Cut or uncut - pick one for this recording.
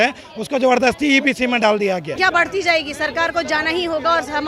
cut